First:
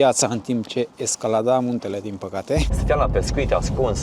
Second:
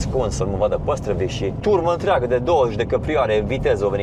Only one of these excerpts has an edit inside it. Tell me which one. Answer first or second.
first